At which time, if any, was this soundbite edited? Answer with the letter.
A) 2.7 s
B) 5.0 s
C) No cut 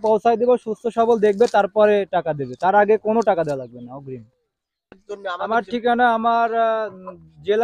B